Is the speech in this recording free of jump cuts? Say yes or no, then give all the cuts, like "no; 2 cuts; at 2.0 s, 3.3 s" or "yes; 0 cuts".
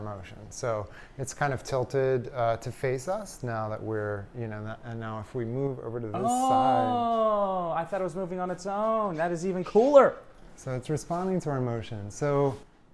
yes; 0 cuts